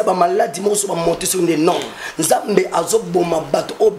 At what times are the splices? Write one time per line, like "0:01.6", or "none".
none